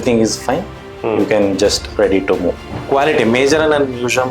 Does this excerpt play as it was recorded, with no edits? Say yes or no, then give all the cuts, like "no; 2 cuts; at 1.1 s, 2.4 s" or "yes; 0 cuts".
no; 1 cut; at 2.8 s